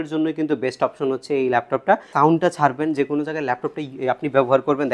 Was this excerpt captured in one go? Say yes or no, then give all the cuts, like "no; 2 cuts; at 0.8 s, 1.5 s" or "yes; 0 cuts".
no; 1 cut; at 2.1 s